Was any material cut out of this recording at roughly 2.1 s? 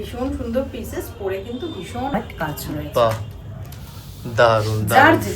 yes; 1 cut; at 2.1 s

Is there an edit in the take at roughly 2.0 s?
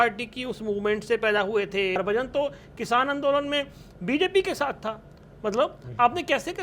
yes; 1 cut; at 2.0 s

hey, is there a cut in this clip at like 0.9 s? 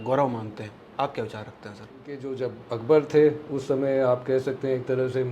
no; 1 cut; at 2.3 s

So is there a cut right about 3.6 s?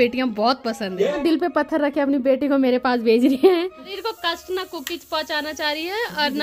yes; 2 cuts; at 1.2 s, 3.6 s

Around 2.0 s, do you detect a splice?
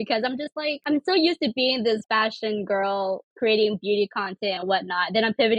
yes; 2 cuts; at 0.8 s, 2.0 s

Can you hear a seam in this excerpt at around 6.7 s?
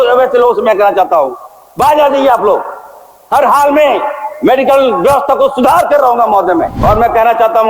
yes; 1 cut; at 6.7 s

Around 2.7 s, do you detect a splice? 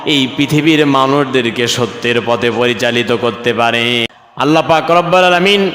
no; 1 cut; at 4.1 s

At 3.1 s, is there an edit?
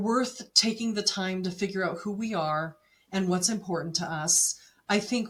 no; 0 cuts

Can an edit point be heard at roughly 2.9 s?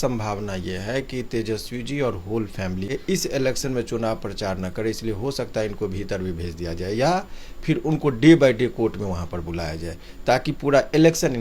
yes; 1 cut; at 2.9 s

